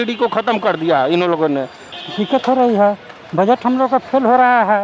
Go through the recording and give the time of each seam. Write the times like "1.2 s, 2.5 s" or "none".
1.8 s